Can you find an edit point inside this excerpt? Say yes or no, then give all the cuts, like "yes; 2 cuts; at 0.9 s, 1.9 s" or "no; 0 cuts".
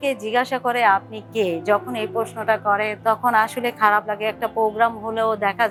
no; 0 cuts